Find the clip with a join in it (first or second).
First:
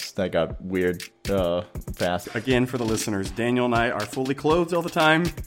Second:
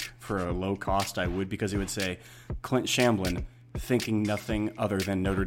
first